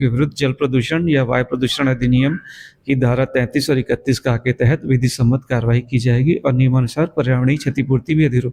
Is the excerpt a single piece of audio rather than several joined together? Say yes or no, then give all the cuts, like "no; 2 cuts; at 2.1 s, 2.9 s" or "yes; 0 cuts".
no; 1 cut; at 6.7 s